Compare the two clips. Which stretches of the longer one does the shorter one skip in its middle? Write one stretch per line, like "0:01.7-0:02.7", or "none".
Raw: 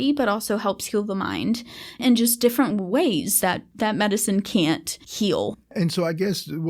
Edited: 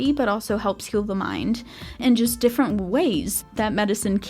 0:03.4-0:03.6